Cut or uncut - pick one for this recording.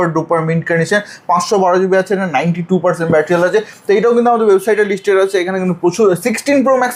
uncut